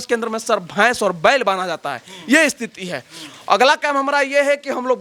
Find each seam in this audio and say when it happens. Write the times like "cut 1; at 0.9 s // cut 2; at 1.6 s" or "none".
none